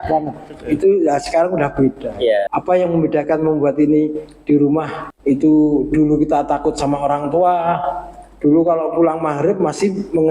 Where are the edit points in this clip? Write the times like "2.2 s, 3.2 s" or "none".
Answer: 2.5 s, 5.0 s